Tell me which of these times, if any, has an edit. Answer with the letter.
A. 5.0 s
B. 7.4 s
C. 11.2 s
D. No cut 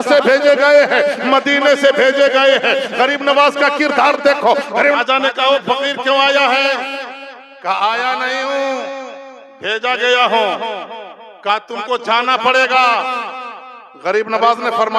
A